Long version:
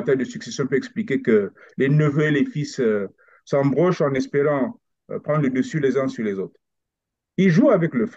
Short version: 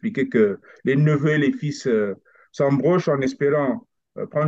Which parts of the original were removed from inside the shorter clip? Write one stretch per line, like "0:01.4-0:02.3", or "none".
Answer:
none